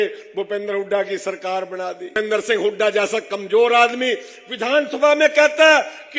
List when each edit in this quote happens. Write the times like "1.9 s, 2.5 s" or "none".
2.1 s